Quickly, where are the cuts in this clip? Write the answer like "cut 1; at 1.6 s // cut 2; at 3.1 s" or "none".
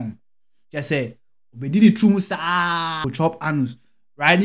cut 1; at 3.1 s